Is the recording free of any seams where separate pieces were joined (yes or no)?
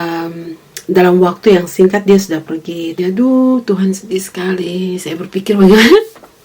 no